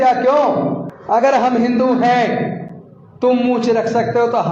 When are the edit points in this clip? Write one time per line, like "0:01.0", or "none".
0:00.9